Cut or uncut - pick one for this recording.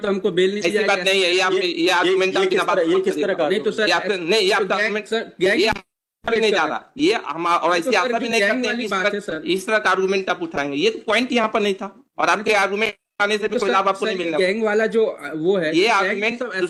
uncut